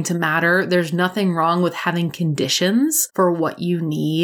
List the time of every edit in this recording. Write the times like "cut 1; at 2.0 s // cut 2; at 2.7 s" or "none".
cut 1; at 3.0 s